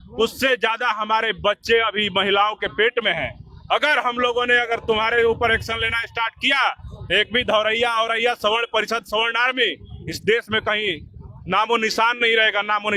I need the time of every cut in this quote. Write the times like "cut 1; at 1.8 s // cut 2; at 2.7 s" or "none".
none